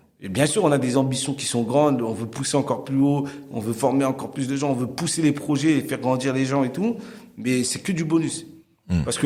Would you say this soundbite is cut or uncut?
uncut